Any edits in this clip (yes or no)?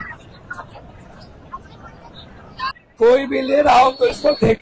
yes